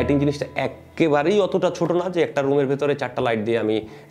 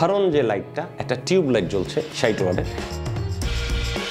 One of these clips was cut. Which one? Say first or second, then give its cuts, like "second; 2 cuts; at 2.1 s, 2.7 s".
second; 1 cut; at 2.8 s